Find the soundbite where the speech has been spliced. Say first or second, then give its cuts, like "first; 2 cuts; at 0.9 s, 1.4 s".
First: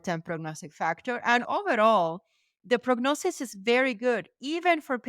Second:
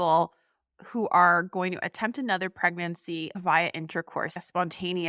first; 1 cut; at 1.4 s